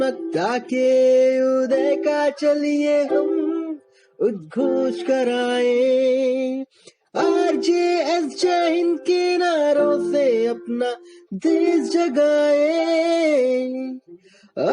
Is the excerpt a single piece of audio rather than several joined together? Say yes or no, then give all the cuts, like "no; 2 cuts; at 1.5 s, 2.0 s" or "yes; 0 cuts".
no; 1 cut; at 13.8 s